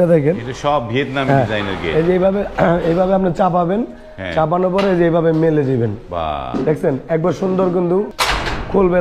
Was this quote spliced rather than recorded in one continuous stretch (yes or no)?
yes